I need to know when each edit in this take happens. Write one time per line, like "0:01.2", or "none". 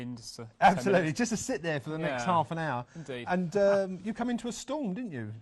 0:03.0